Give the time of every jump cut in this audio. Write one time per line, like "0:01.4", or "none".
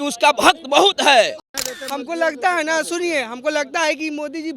0:01.4